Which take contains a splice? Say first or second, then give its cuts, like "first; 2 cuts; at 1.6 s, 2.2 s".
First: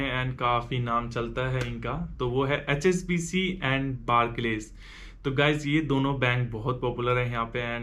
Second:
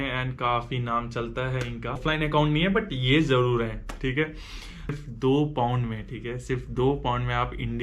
second; 2 cuts; at 2.0 s, 5.0 s